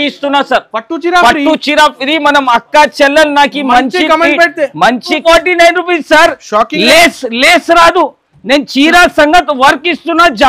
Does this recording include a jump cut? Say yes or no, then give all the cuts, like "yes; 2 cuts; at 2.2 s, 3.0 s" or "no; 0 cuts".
yes; 1 cut; at 5.2 s